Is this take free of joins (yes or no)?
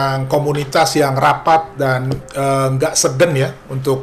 yes